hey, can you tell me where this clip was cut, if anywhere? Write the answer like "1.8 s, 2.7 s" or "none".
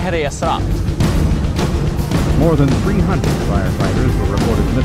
1.6 s

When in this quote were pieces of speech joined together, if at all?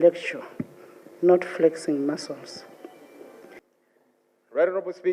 3.6 s

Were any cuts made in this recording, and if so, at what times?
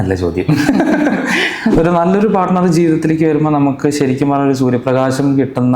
1.7 s

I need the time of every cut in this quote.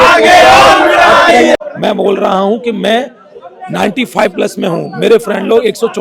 1.6 s

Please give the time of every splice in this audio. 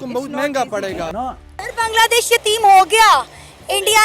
1.3 s

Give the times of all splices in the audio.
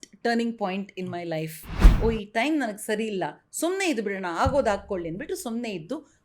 1.8 s

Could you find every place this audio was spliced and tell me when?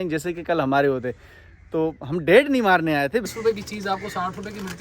3.2 s

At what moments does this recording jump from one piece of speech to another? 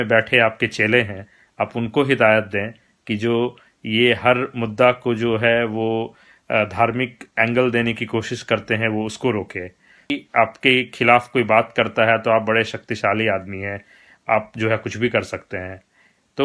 10.1 s

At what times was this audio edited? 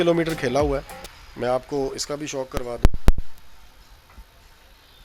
none

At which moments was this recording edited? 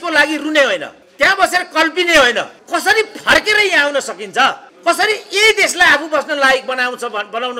1.0 s, 2.6 s, 4.7 s

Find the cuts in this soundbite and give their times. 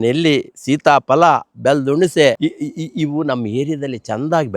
2.4 s

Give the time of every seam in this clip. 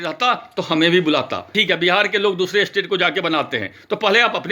1.6 s

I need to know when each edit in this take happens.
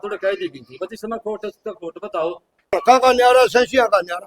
2.8 s

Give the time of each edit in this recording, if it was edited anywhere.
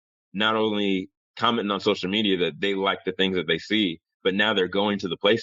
none

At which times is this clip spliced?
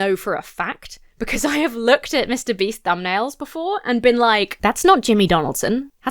4.5 s

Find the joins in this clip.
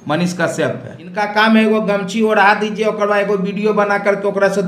1.2 s

